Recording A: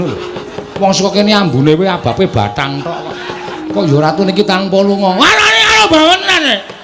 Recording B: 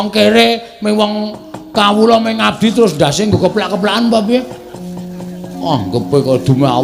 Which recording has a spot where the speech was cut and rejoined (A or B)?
A